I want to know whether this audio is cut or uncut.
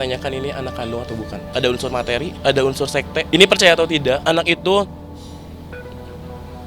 cut